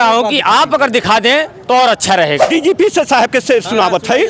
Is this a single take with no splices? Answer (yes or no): no